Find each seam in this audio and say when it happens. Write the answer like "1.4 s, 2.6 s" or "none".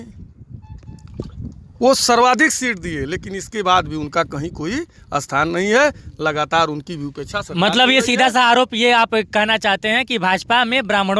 none